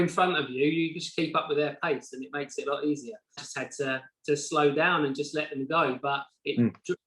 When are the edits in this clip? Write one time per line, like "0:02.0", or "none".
0:03.4

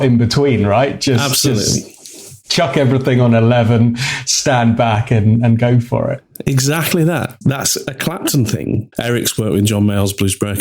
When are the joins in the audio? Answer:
0:07.3
0:08.9

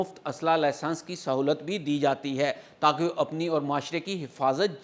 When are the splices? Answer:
none

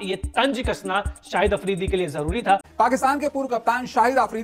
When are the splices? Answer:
0:02.7

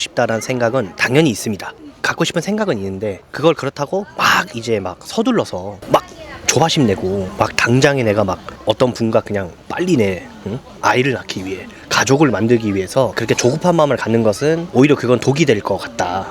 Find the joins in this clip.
0:01.8
0:13.2
0:14.6

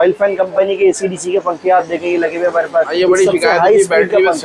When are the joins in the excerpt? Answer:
0:02.9

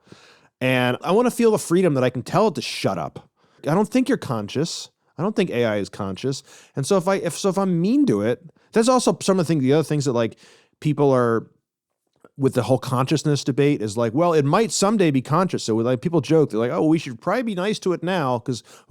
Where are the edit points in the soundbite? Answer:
0:01.0
0:03.6

